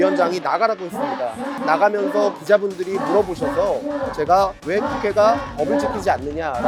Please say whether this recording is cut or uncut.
uncut